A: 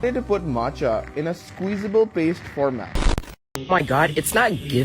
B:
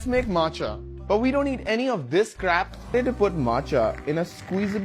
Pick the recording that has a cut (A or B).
A